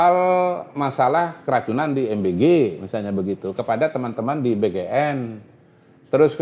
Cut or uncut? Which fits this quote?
uncut